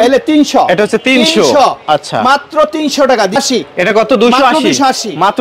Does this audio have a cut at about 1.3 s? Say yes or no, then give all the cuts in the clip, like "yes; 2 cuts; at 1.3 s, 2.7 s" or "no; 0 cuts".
no; 1 cut; at 3.3 s